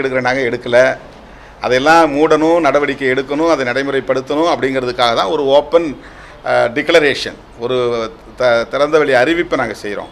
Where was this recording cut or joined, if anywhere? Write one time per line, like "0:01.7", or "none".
none